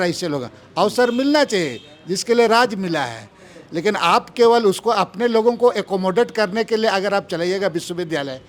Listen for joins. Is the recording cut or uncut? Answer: uncut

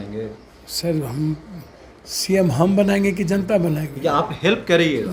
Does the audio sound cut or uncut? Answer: uncut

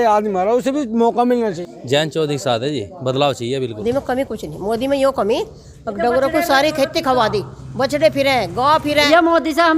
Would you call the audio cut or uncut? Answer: cut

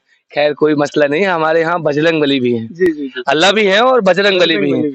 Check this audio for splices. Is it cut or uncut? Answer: uncut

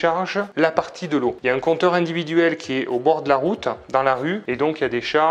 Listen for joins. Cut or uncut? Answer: uncut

